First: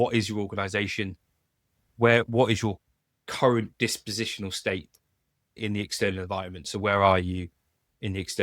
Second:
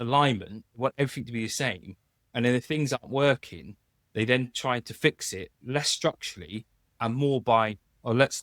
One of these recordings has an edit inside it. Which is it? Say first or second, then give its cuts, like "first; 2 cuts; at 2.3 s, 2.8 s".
first; 1 cut; at 5.6 s